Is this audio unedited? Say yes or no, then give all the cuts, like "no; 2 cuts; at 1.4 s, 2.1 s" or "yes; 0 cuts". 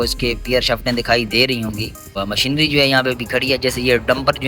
no; 1 cut; at 2.1 s